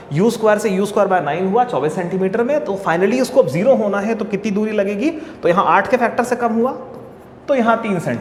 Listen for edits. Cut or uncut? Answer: uncut